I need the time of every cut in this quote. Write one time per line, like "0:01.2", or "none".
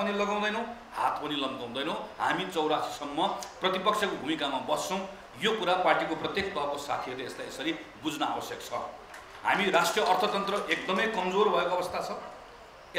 none